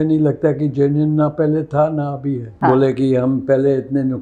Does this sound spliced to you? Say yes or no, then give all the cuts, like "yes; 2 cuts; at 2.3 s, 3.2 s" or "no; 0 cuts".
yes; 1 cut; at 2.5 s